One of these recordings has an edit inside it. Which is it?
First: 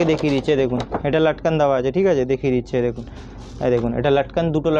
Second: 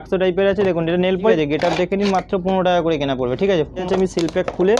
second; 2 cuts; at 1.3 s, 3.8 s

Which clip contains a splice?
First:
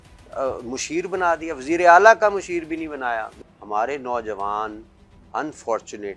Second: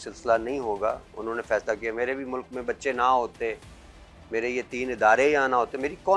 first; 1 cut; at 3.4 s

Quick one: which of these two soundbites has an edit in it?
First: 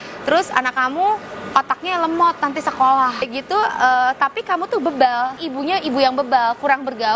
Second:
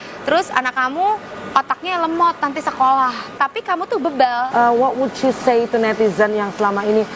second; 2 cuts; at 3.3 s, 4.5 s

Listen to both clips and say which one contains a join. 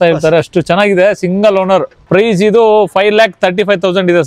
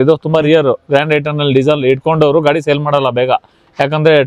first; 1 cut; at 2.0 s

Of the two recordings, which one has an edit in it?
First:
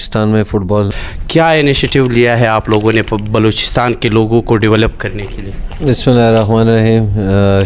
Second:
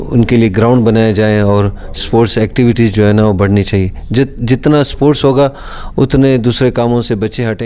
first; 1 cut; at 0.9 s

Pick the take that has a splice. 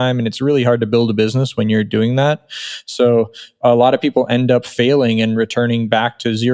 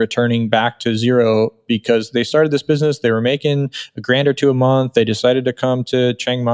second; 1 cut; at 2.1 s

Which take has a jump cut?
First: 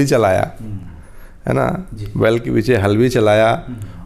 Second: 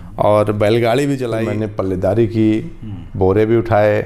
second; 1 cut; at 1.4 s

